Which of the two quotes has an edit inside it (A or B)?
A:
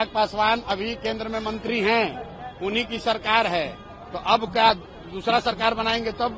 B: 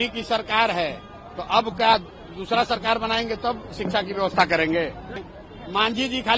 B